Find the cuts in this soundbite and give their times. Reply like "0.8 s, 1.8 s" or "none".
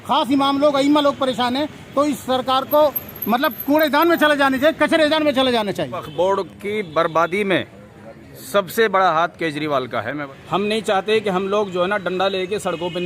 5.9 s, 10.2 s